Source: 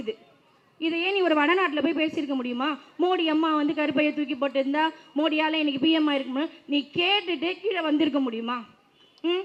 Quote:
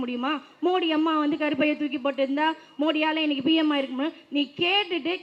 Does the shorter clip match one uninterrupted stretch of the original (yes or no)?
yes